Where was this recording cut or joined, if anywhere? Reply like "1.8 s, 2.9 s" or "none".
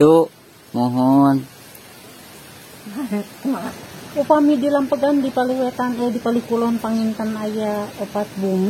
4.0 s